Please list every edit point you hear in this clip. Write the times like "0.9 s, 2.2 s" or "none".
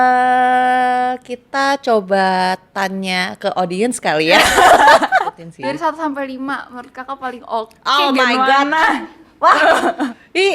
5.4 s